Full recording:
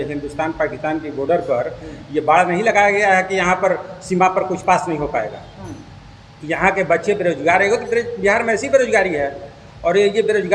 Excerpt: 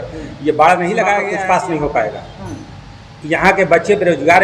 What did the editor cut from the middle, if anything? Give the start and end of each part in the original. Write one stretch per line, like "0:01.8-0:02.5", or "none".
0:03.0-0:04.5